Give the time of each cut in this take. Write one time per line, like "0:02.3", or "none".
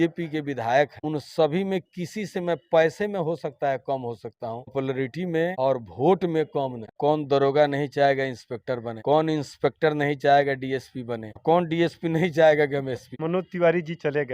0:01.0
0:05.5
0:06.9
0:13.1